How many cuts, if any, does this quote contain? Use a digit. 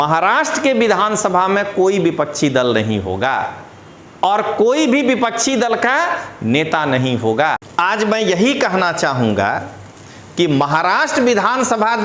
1